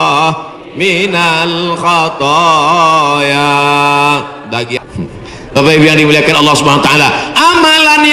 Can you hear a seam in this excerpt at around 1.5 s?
no; 1 cut; at 4.8 s

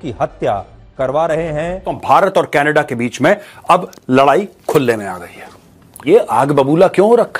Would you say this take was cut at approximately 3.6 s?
no; 2 cuts; at 2.0 s, 6.0 s

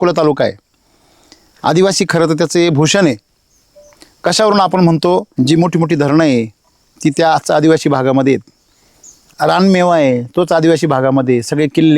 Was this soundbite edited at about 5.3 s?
yes; 2 cuts; at 5.3 s, 9.3 s

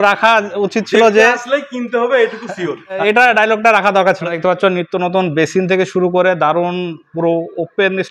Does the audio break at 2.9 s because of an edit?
no; 0 cuts

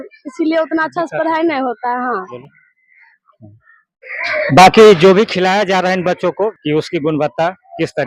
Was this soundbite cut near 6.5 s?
yes; 2 cuts; at 2.4 s, 6.5 s

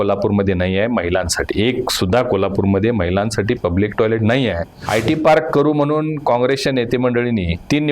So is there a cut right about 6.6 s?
no; 1 cut; at 4.7 s

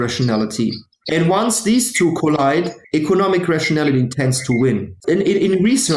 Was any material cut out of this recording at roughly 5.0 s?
yes; 3 cuts; at 0.9 s, 2.8 s, 5.0 s

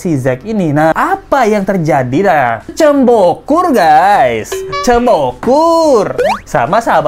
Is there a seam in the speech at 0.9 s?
yes; 2 cuts; at 0.9 s, 2.7 s

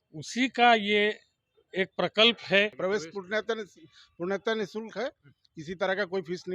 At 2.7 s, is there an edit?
yes; 1 cut; at 2.7 s

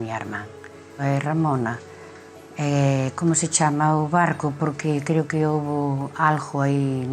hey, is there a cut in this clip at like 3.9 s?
no; 1 cut; at 1.0 s

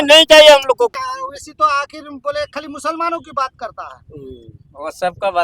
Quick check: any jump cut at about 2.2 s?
no; 1 cut; at 0.9 s

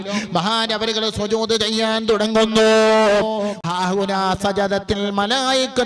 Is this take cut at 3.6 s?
yes; 1 cut; at 3.6 s

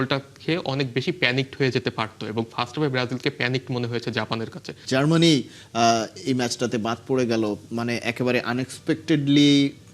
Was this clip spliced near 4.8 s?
yes; 1 cut; at 4.8 s

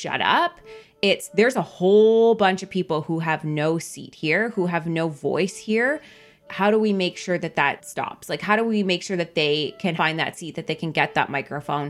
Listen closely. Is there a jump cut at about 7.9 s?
yes; 3 cuts; at 6.4 s, 7.9 s, 9.9 s

